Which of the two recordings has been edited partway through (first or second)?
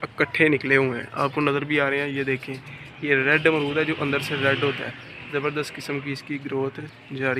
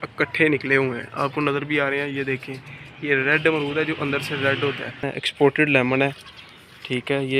second